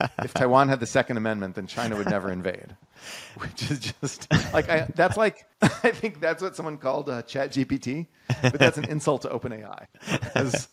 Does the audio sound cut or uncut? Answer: cut